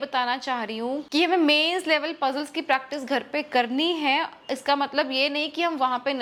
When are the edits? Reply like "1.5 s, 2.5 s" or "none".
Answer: none